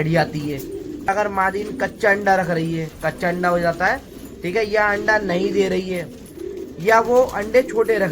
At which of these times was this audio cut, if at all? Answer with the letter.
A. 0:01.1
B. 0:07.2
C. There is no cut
A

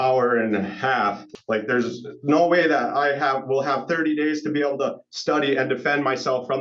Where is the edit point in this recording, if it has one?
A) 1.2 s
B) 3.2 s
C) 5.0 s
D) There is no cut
A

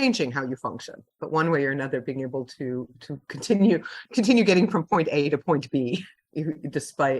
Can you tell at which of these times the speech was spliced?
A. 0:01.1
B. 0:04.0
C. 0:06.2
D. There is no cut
C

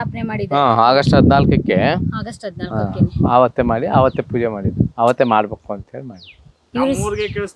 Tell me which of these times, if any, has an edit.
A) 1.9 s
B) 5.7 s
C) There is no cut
C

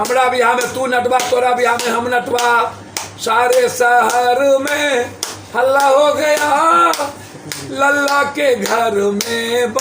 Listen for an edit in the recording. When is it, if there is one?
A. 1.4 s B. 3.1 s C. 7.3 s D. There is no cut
D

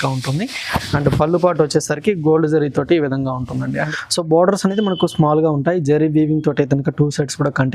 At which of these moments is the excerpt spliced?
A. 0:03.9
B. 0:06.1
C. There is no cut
A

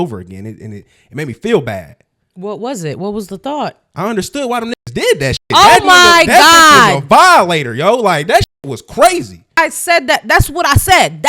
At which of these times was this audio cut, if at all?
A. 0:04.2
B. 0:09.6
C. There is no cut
B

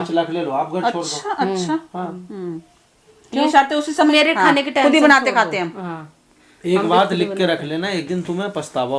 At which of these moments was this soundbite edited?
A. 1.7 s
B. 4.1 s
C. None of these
B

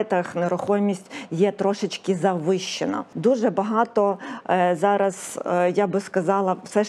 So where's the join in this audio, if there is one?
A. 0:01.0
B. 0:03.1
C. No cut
B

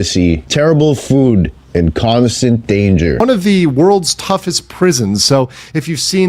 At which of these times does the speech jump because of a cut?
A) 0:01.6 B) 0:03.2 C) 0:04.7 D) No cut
B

